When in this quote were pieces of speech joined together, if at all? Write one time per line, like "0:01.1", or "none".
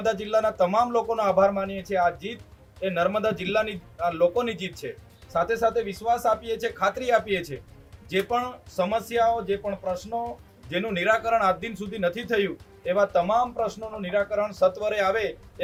none